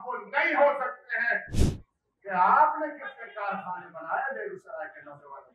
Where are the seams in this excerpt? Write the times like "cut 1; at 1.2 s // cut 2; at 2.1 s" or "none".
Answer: cut 1; at 1.5 s